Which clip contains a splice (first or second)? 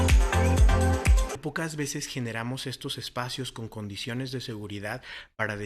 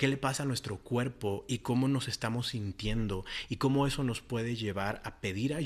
first